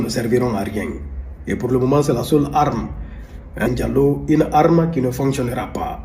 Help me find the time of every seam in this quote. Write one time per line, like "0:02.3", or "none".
0:03.7